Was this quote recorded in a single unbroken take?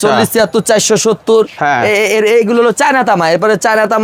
yes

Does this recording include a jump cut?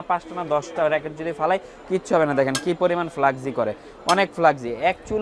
no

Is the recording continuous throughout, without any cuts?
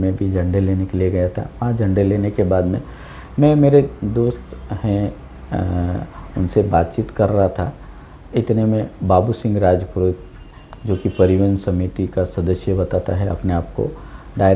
yes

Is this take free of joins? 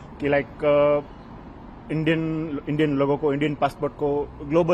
yes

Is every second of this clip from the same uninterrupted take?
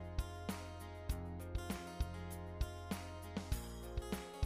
yes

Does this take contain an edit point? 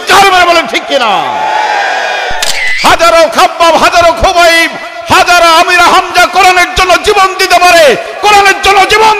yes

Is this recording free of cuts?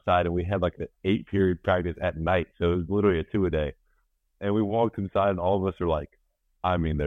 yes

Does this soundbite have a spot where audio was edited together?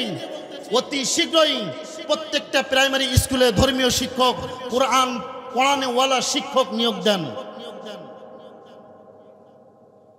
no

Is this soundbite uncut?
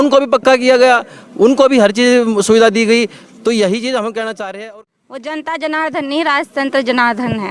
no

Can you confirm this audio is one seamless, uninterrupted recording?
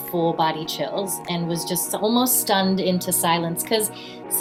yes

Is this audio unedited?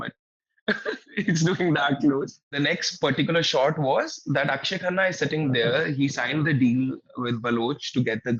no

